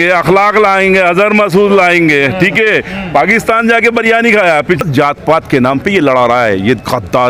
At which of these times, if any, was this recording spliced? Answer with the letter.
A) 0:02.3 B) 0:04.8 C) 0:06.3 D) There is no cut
B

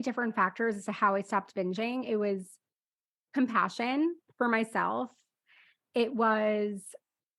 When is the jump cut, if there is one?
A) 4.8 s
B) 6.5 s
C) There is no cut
C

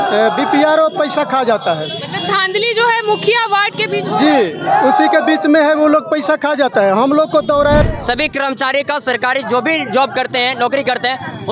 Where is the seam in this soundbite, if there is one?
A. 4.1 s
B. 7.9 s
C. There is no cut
B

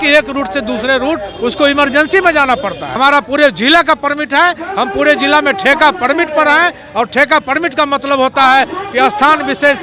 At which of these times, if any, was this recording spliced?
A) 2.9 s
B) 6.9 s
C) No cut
A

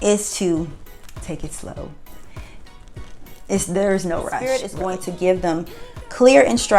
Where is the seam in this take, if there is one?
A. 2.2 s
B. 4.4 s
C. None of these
B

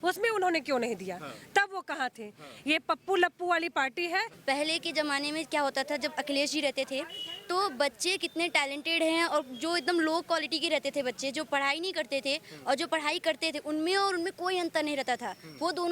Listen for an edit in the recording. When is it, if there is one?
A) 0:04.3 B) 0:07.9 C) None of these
A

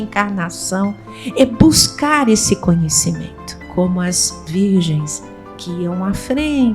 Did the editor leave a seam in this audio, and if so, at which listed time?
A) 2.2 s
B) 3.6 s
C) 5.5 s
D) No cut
B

